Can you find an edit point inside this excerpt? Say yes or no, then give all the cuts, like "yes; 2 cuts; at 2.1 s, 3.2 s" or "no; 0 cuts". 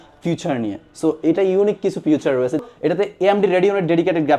yes; 1 cut; at 2.6 s